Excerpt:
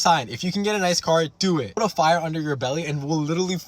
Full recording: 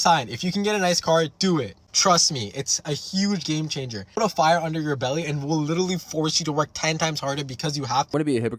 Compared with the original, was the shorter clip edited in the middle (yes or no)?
yes